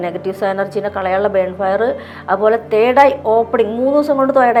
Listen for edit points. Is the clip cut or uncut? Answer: uncut